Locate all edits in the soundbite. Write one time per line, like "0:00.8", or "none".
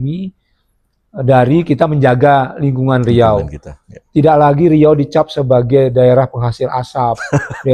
none